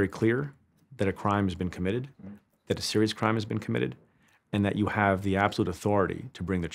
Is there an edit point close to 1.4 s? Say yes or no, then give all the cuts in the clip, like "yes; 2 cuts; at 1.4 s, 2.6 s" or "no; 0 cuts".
no; 0 cuts